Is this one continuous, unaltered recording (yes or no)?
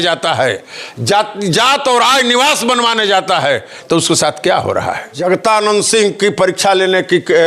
no